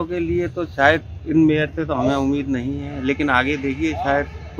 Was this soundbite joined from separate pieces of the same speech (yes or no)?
no